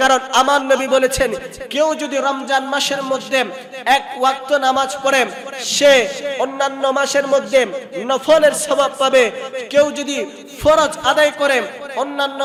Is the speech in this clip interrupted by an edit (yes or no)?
no